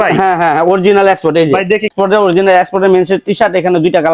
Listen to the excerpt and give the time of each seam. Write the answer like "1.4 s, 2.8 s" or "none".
1.9 s